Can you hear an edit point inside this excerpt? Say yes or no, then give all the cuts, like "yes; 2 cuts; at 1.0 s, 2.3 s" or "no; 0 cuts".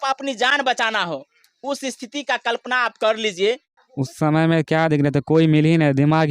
yes; 1 cut; at 3.8 s